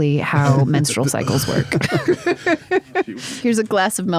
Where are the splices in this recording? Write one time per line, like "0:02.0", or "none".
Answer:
0:03.1

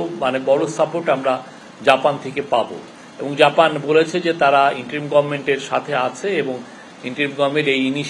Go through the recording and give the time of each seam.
none

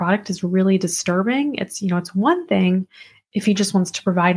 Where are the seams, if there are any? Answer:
none

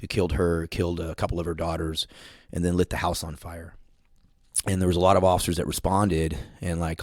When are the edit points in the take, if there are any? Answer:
none

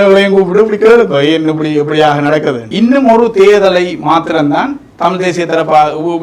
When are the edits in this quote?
0:02.6

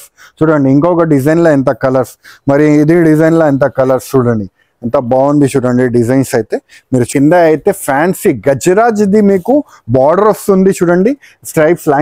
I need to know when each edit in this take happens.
0:07.1

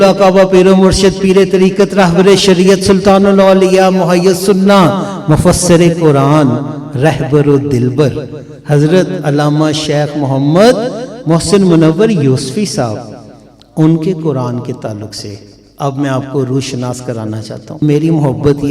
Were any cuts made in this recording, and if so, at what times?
0:17.8

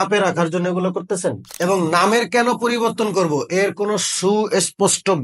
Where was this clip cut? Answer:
0:01.5

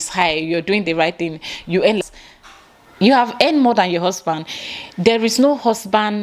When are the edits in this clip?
0:02.0

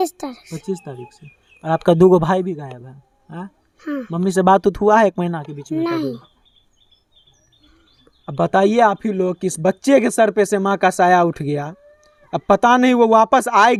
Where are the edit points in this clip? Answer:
none

